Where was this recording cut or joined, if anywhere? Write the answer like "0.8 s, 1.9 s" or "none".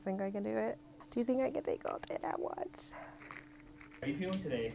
0.9 s, 3.9 s